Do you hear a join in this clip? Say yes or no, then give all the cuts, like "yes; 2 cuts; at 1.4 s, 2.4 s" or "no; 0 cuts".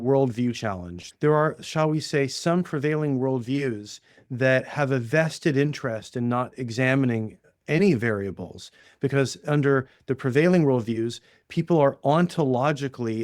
yes; 1 cut; at 1.0 s